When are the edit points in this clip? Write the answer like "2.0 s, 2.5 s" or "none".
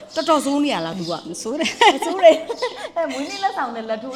none